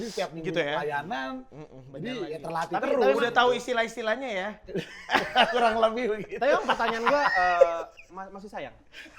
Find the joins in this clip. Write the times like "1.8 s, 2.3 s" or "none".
none